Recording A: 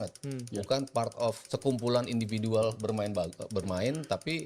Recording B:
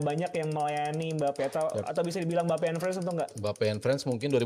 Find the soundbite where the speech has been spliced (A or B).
A